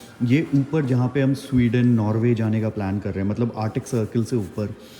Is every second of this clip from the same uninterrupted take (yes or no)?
yes